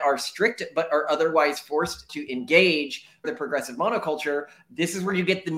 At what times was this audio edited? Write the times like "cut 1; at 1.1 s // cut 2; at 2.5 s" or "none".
cut 1; at 2.2 s // cut 2; at 3.3 s

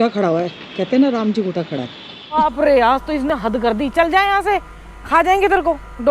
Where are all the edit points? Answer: cut 1; at 2.2 s

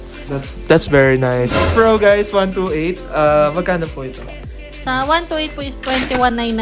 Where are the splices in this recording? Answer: cut 1; at 1.7 s

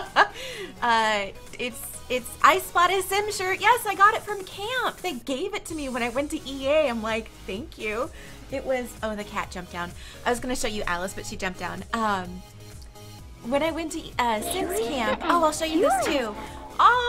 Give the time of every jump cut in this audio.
cut 1; at 1.9 s

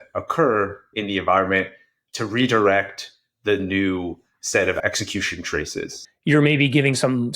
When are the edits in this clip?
cut 1; at 4.8 s // cut 2; at 6.0 s

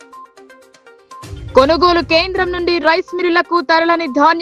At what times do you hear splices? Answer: none

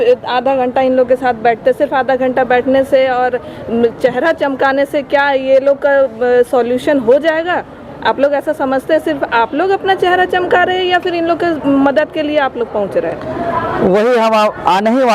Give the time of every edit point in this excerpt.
none

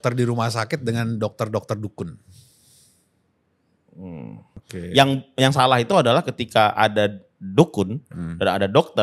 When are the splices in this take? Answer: cut 1; at 4.6 s

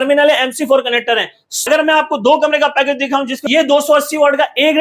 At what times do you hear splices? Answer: cut 1; at 1.5 s // cut 2; at 3.4 s

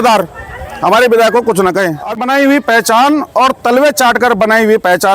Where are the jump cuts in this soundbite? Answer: cut 1; at 2.0 s

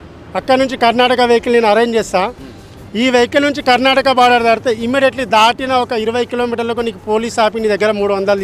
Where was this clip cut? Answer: none

